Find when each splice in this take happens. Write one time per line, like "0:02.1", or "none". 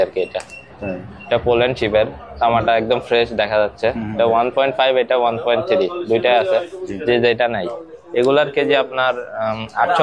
none